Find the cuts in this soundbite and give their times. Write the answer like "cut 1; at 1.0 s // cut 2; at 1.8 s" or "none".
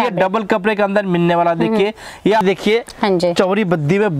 cut 1; at 2.4 s